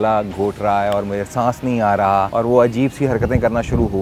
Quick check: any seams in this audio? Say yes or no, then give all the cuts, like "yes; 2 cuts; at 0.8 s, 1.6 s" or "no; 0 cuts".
yes; 1 cut; at 2.3 s